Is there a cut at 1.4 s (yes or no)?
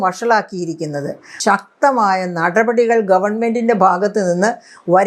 yes